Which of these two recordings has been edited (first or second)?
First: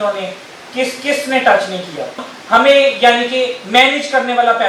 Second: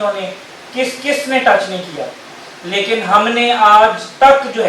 first